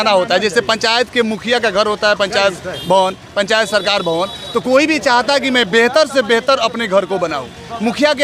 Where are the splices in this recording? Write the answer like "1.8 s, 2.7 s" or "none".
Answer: none